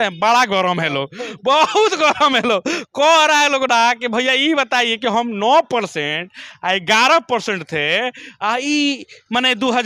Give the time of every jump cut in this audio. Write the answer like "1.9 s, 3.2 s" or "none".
none